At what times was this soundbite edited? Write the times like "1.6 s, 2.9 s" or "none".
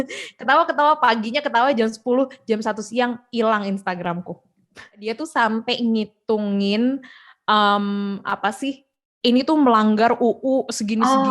5.0 s